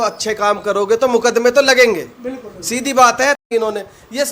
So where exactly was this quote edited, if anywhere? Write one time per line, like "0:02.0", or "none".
0:03.4

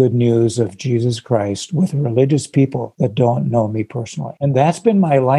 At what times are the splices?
0:02.8
0:04.3

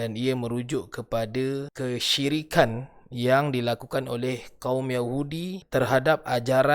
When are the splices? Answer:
0:01.7
0:05.6

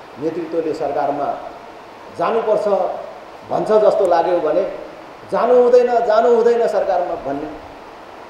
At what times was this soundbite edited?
none

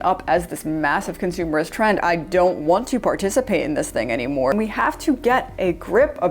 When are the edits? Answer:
0:02.0
0:04.5

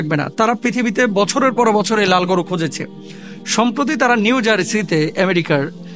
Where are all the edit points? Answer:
none

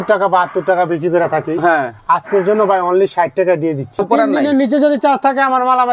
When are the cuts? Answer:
0:04.0

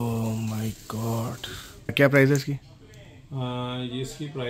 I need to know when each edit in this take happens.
0:01.9

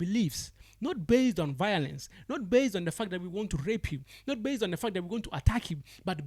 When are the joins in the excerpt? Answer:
none

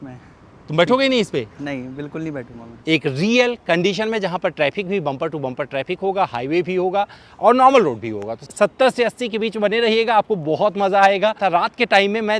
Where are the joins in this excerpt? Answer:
0:02.7
0:08.5
0:11.4

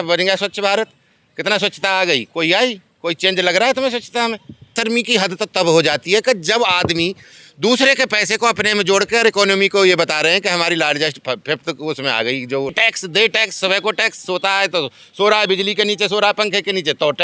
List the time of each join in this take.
0:04.8
0:12.7

